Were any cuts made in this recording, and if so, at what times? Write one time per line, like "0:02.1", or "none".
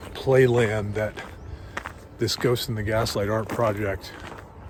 none